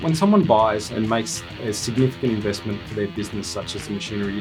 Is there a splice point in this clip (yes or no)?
no